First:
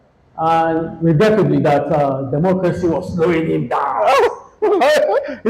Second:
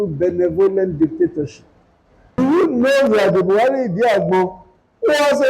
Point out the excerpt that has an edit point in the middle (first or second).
second